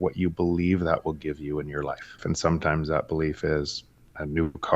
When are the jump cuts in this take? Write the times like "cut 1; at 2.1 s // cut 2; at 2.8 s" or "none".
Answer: cut 1; at 2.2 s